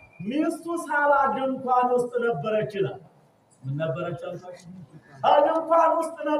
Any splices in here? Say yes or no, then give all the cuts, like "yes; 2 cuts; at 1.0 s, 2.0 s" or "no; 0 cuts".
no; 0 cuts